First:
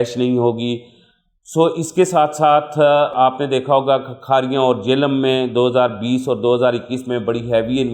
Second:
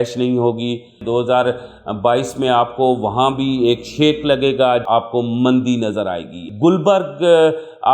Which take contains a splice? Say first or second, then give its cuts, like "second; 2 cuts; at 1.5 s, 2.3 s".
second; 3 cuts; at 1.0 s, 4.8 s, 6.5 s